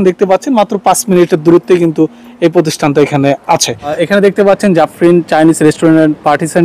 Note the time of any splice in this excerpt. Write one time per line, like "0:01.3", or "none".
0:04.0

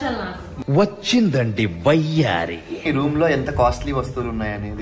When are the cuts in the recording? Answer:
0:02.8

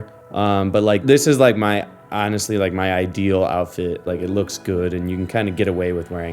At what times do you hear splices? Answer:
0:01.0
0:04.0

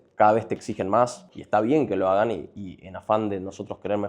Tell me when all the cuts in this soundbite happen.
0:01.3

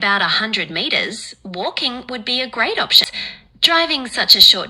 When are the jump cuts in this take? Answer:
0:03.0

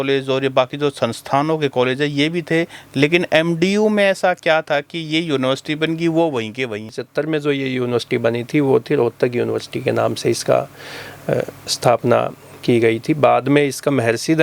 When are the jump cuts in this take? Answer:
0:07.0

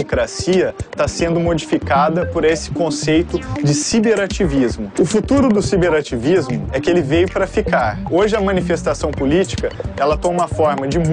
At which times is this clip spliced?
0:04.9
0:08.0

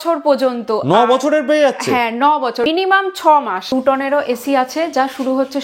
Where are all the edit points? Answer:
0:02.7
0:03.7

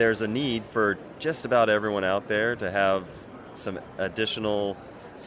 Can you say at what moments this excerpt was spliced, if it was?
none

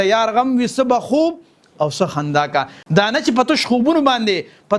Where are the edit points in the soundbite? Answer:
0:02.8

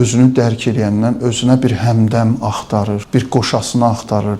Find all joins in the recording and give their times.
0:03.0

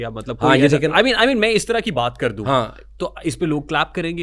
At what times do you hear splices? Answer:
none

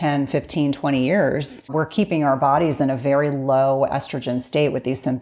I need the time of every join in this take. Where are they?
0:01.7

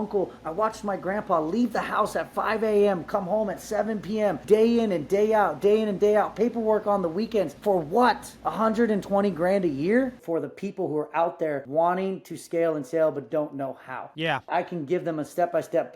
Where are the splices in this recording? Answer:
0:04.4
0:07.5
0:08.3
0:10.2
0:11.7
0:14.5

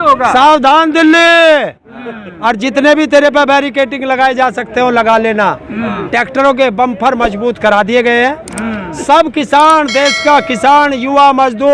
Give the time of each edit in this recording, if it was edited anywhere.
none

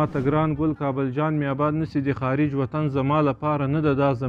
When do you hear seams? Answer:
none

